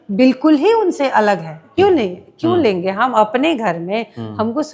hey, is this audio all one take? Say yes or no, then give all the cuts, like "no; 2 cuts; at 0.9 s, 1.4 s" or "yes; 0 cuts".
no; 1 cut; at 1.7 s